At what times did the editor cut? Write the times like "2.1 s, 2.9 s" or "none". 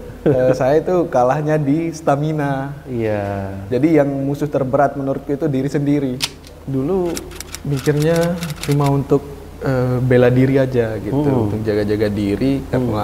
6.4 s

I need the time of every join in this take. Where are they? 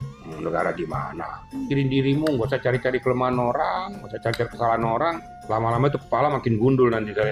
1.6 s, 5.3 s

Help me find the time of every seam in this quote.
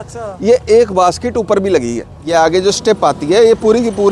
2.3 s

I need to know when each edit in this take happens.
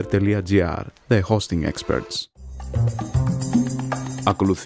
2.3 s

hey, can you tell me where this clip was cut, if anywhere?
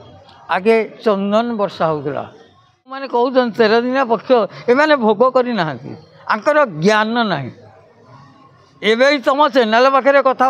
3.1 s

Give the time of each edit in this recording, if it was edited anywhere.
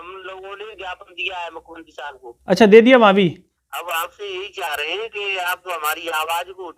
3.5 s

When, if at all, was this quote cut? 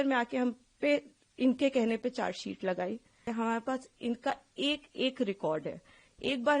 3.3 s

